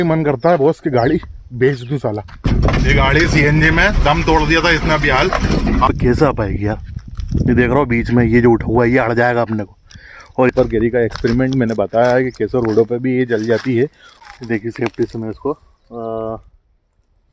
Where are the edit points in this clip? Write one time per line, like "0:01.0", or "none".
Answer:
0:02.4
0:05.9
0:10.5
0:14.1